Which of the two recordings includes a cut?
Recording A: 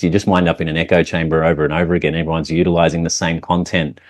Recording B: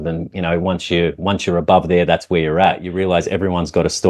B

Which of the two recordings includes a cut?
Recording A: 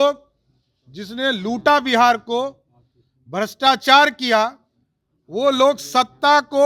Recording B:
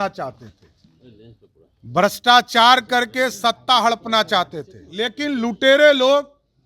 B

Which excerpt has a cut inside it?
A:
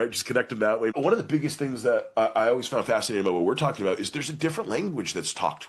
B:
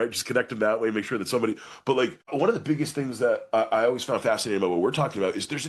A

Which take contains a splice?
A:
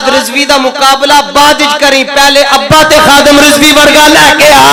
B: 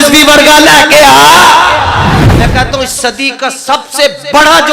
B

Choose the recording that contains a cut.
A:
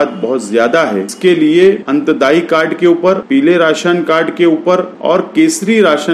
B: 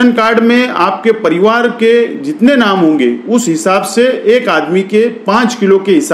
A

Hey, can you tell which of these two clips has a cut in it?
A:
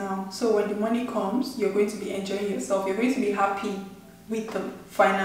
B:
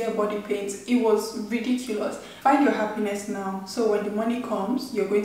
B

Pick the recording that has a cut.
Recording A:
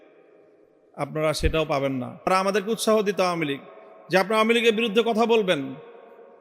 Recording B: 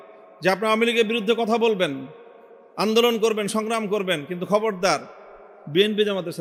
A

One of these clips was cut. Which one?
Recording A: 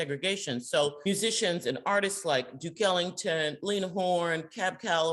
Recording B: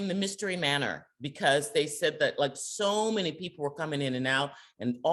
A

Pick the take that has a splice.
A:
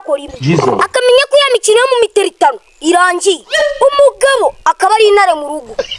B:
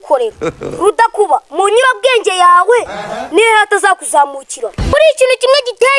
B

